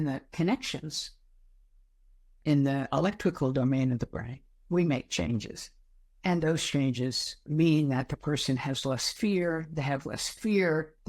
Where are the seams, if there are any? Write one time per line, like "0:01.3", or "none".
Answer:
0:02.4
0:07.4